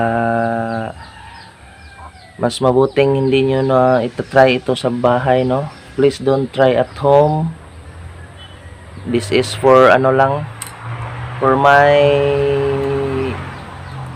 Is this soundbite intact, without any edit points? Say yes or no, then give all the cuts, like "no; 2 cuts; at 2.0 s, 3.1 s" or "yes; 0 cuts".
yes; 0 cuts